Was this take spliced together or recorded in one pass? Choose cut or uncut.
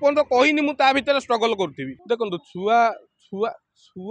cut